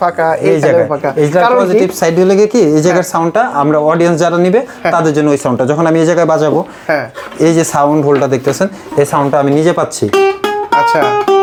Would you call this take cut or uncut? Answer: uncut